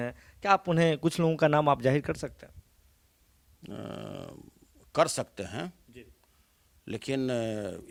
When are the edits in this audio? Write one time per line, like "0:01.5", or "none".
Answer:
none